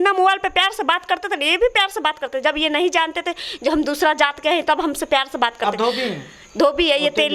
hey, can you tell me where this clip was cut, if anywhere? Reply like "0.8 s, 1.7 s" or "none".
none